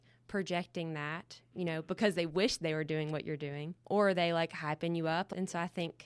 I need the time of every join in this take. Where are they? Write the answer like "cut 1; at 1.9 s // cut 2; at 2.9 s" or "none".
cut 1; at 3.7 s // cut 2; at 5.3 s